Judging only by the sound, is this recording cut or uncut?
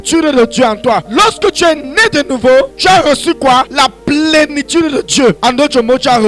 cut